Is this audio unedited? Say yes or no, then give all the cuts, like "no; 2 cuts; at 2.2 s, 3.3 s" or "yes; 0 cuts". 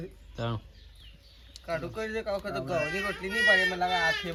yes; 0 cuts